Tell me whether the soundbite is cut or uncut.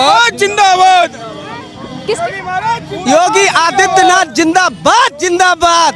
uncut